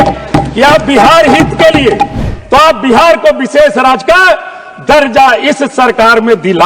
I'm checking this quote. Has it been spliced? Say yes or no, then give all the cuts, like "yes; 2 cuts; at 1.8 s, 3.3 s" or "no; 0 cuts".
yes; 1 cut; at 2.2 s